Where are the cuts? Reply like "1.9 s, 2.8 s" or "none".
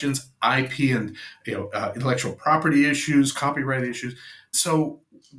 none